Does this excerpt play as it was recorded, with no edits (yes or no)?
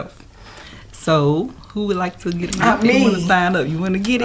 no